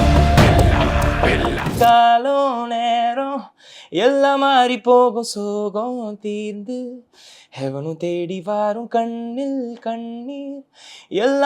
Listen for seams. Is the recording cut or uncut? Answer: cut